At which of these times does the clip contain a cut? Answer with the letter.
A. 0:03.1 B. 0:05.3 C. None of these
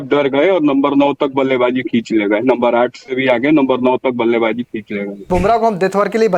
B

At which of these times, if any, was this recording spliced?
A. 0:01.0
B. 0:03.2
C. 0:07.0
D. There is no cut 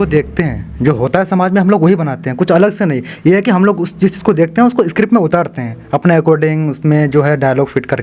D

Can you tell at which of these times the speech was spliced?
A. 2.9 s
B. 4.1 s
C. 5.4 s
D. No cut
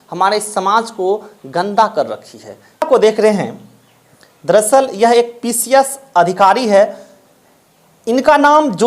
A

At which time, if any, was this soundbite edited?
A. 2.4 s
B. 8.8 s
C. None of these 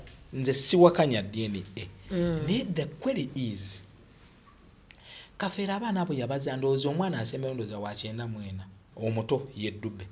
B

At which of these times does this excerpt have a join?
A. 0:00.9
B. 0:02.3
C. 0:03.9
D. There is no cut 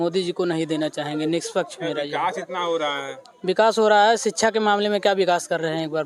D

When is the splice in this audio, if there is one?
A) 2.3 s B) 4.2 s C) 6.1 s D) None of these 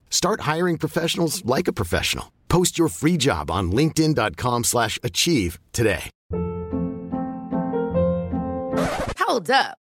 C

